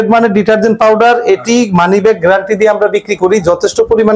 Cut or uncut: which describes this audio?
uncut